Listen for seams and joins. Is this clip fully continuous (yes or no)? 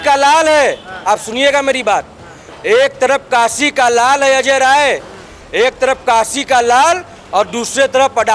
yes